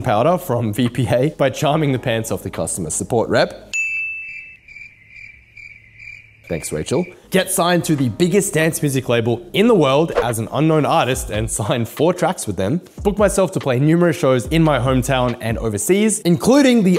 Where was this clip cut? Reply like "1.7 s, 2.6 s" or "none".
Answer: none